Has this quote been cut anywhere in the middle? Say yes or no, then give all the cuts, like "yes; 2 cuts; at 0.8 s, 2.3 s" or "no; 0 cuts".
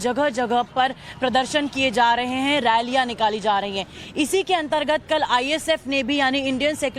yes; 1 cut; at 2.6 s